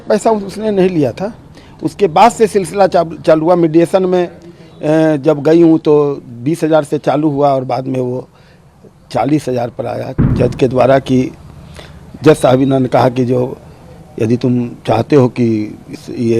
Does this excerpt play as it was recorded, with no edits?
no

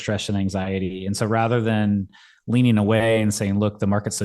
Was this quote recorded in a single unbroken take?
yes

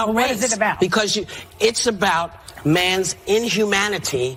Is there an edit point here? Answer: no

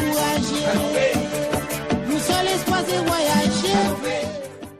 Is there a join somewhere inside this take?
yes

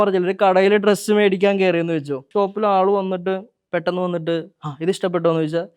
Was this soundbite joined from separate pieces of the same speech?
yes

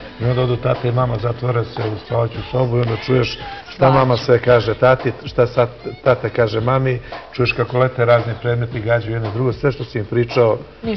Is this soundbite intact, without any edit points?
yes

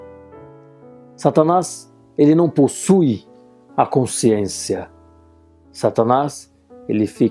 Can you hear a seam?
no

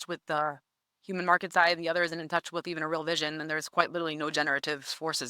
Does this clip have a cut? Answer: no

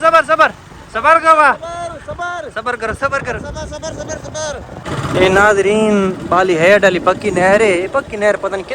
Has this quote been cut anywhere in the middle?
yes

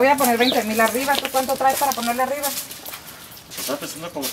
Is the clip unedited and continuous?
yes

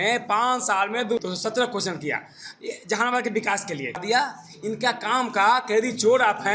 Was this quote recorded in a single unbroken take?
no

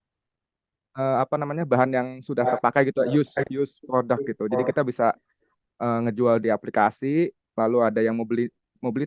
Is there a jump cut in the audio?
no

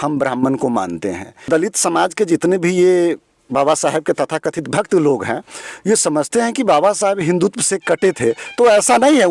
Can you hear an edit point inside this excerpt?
yes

